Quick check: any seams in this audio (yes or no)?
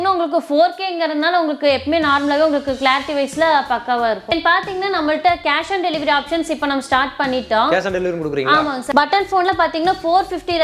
yes